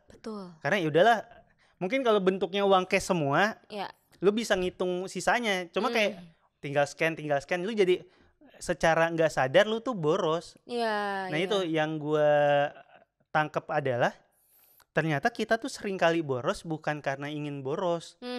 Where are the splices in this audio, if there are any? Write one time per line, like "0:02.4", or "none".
none